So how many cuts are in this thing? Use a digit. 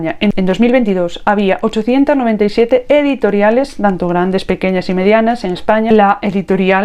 1